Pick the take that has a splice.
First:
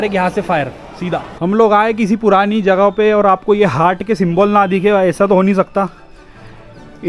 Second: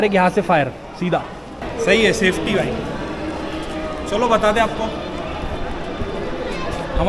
first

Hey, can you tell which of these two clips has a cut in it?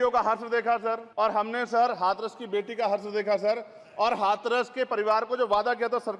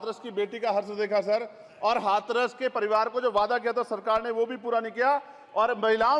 first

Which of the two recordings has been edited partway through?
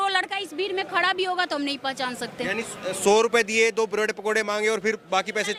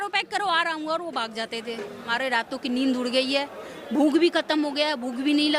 second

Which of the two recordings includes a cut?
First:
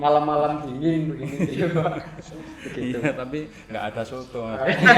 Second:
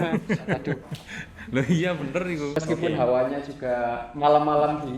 second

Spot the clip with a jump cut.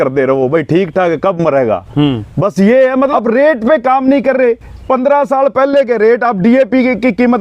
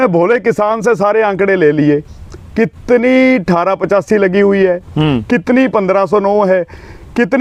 first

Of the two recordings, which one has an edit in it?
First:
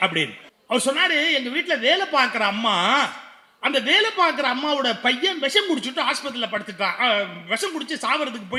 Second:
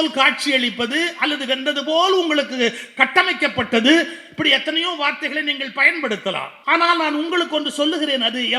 second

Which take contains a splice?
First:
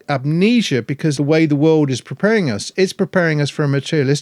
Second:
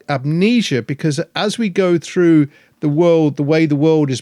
first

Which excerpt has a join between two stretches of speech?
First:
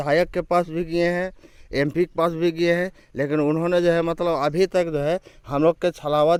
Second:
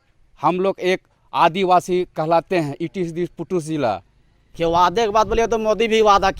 second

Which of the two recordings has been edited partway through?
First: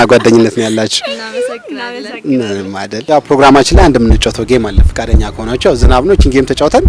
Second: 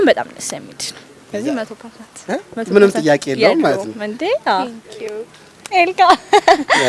first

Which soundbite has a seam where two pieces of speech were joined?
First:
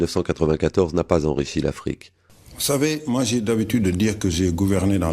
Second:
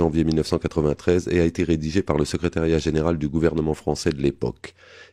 first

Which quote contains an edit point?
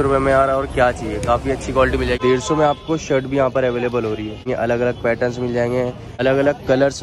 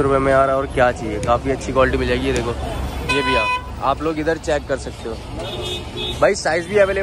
first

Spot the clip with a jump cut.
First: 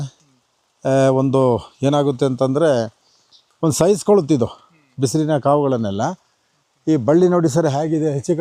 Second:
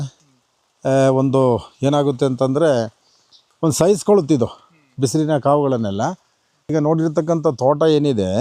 second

